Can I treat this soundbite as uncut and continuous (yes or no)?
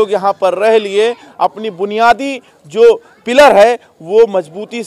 yes